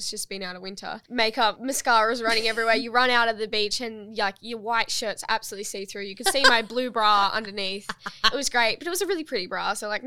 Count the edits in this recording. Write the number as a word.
two